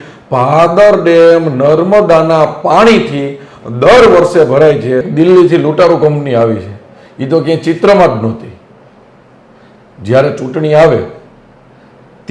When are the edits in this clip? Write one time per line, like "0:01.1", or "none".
0:05.1